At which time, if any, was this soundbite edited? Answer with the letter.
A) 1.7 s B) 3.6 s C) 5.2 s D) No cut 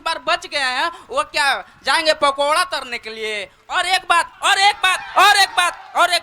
D